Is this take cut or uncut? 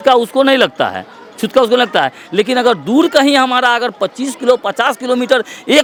uncut